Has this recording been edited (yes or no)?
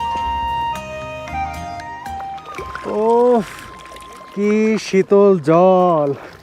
yes